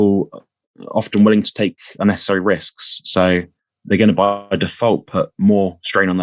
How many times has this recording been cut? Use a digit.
0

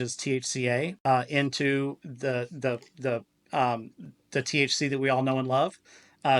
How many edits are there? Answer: 1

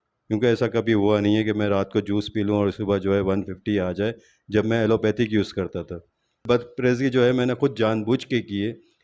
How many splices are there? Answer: 1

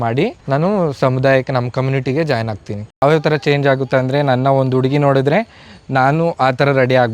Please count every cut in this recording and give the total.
1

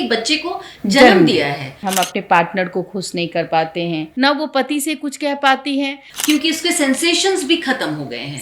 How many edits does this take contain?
3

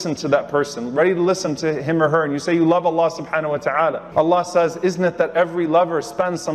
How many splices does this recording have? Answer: 0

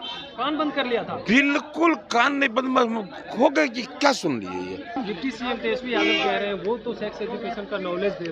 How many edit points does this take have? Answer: 1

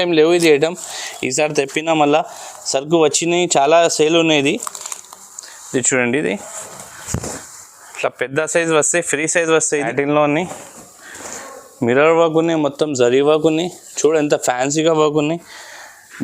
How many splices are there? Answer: 1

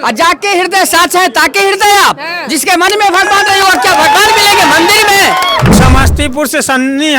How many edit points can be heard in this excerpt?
1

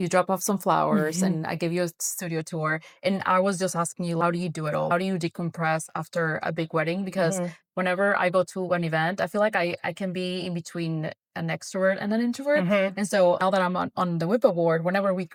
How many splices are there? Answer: 0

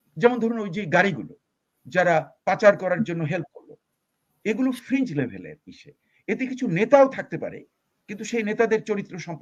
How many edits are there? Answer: 0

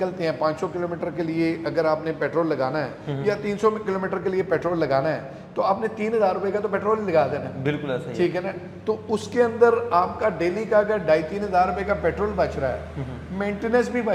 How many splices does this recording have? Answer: 0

